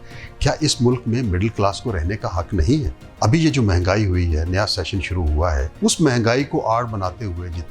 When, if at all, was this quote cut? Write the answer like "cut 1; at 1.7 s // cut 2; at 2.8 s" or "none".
cut 1; at 3.0 s // cut 2; at 5.7 s